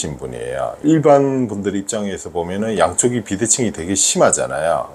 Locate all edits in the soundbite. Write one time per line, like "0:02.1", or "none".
none